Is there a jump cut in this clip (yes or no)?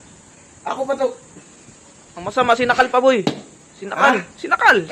no